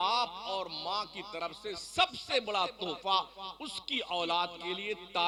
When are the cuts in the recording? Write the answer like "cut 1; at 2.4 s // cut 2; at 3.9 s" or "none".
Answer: none